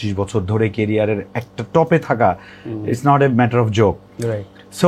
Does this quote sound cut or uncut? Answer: uncut